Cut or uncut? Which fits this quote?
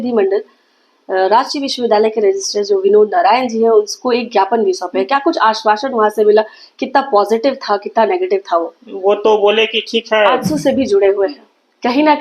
cut